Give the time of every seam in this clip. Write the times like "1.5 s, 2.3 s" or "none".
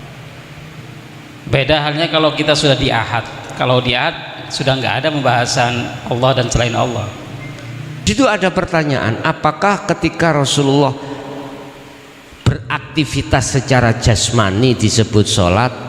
8.0 s